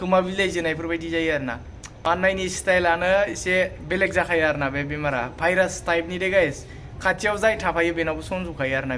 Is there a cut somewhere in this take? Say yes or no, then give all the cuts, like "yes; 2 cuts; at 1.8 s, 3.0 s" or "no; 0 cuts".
yes; 1 cut; at 1.8 s